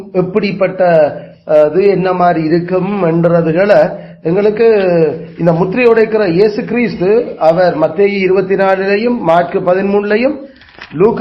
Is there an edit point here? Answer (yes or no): no